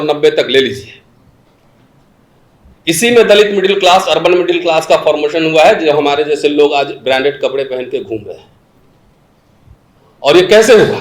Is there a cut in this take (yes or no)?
no